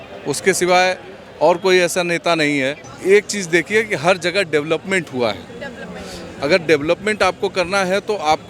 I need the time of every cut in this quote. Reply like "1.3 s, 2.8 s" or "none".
2.9 s